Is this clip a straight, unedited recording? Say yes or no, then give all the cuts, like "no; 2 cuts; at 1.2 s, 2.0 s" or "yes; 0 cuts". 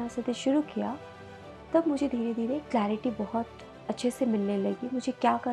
yes; 0 cuts